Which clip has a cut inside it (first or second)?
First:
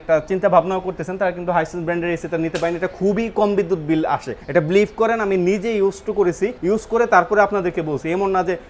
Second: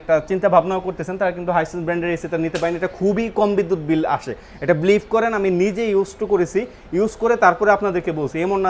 first